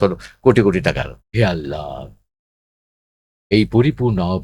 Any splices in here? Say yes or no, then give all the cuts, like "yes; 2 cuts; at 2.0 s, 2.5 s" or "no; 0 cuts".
yes; 1 cut; at 1.2 s